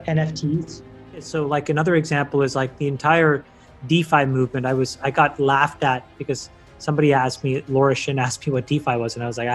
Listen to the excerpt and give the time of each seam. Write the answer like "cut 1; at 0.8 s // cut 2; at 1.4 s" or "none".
cut 1; at 1.3 s